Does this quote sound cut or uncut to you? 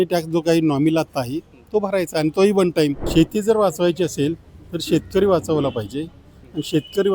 cut